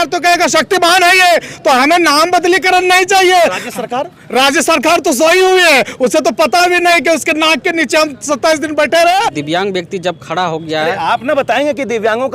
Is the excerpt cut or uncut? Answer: cut